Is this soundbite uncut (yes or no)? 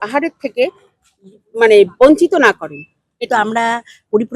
no